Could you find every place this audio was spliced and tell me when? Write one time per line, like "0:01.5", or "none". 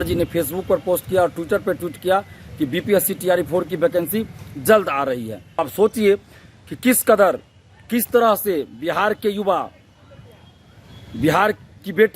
0:05.4